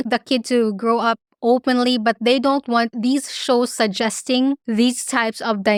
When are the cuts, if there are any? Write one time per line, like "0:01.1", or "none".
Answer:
none